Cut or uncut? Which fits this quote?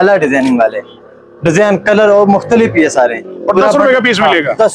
uncut